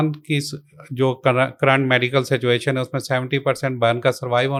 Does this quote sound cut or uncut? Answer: uncut